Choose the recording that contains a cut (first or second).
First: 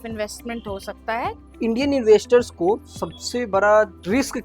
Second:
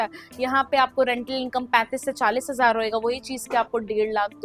first